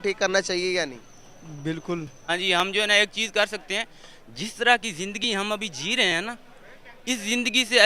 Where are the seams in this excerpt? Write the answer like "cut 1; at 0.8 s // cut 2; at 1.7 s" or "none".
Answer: cut 1; at 2.2 s